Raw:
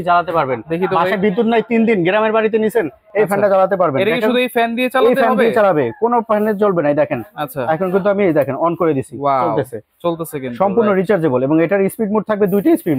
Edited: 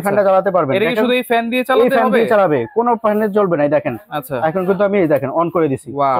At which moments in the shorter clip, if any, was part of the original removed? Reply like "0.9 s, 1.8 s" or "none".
none

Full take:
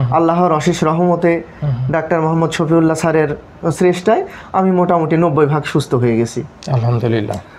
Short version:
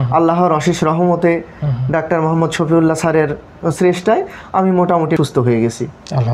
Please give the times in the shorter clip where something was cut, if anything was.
5.2 s

